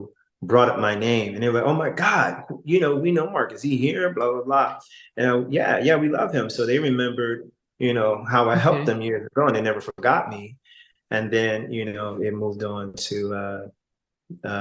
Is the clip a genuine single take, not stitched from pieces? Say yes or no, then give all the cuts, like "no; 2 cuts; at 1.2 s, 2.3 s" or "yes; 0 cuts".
yes; 0 cuts